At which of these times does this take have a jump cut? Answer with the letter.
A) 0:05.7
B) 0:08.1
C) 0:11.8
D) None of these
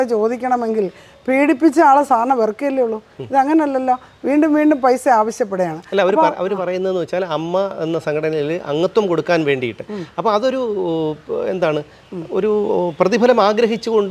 D